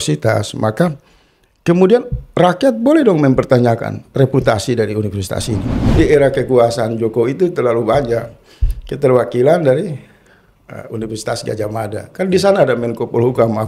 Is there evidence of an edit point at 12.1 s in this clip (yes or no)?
no